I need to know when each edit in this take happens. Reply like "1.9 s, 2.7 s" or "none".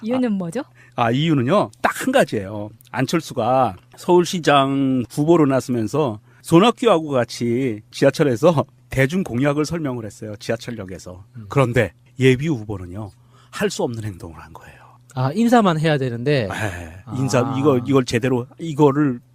17.8 s